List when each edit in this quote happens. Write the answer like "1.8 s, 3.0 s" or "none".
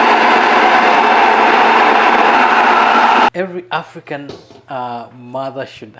0.9 s, 2.4 s